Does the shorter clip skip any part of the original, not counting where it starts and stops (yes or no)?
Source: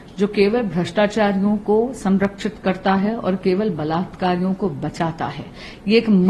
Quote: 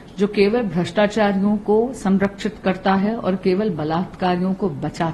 no